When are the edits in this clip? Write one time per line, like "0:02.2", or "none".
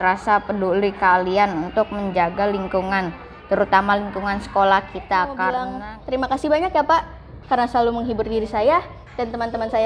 0:05.8